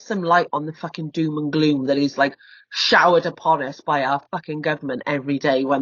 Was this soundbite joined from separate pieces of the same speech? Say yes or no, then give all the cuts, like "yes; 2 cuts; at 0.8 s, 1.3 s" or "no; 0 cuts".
no; 0 cuts